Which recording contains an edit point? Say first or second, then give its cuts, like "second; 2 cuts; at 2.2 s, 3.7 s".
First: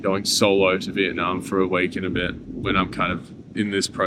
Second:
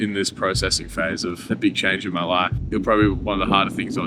second; 2 cuts; at 1.4 s, 2.6 s